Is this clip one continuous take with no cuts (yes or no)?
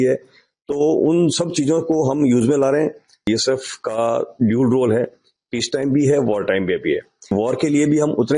no